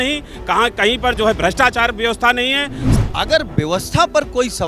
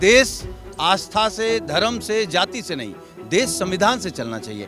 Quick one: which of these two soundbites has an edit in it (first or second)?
first